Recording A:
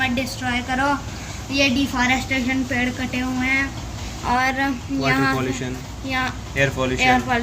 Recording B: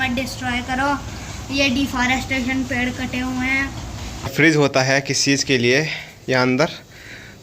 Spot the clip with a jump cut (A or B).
B